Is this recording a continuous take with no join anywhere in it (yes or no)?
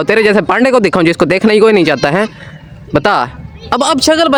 yes